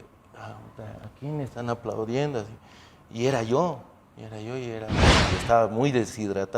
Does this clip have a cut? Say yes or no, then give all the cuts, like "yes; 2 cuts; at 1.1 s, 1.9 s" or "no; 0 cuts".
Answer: yes; 1 cut; at 5.2 s